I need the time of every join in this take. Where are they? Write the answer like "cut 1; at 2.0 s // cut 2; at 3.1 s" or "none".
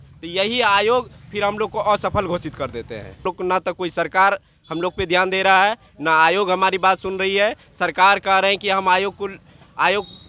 cut 1; at 3.2 s